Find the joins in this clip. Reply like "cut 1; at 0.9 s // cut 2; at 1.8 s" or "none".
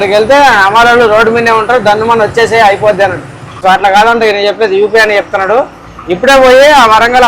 cut 1; at 3.6 s